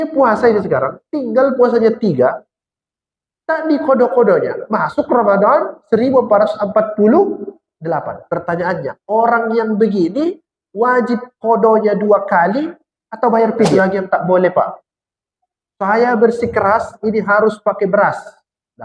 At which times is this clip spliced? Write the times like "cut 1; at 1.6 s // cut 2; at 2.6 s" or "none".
cut 1; at 13.8 s